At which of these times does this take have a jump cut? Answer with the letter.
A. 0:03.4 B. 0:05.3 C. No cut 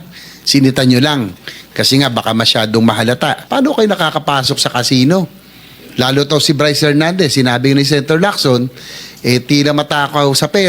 A